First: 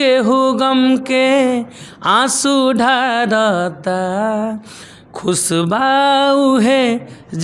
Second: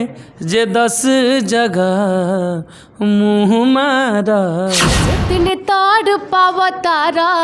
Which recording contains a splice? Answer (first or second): second